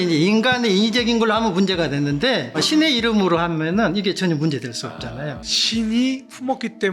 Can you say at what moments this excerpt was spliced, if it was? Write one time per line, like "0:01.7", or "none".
0:02.6
0:05.4